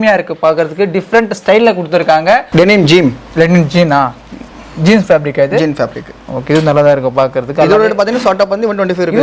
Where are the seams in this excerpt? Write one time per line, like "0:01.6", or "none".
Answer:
0:02.5

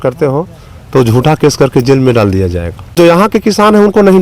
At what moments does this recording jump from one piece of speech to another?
0:03.3

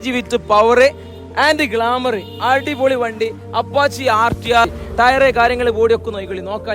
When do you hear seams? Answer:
0:04.7

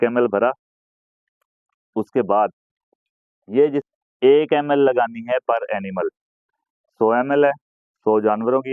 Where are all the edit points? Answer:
0:03.9

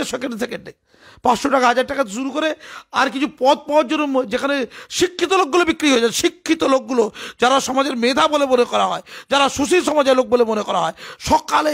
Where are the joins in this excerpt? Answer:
none

